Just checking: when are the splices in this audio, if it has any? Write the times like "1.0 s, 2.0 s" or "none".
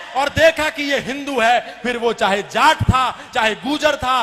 none